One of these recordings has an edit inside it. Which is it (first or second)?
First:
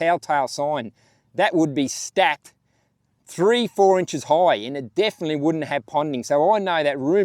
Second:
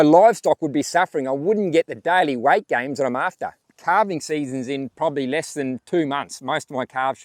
second